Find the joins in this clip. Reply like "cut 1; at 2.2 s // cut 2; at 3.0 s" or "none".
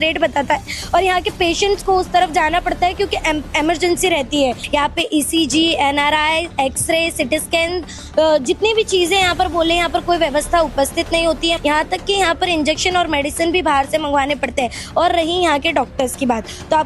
cut 1; at 4.6 s // cut 2; at 11.6 s